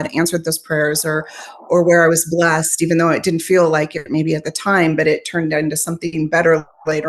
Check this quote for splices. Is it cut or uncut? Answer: uncut